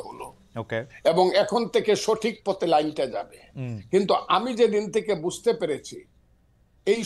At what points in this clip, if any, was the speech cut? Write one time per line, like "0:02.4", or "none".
none